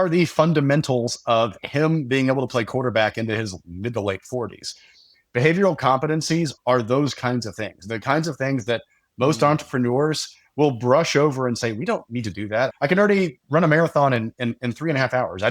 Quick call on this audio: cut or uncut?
cut